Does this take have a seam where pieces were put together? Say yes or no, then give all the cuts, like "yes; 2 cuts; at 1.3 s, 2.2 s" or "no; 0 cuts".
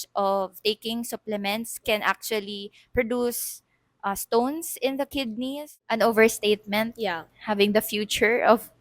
yes; 1 cut; at 5.8 s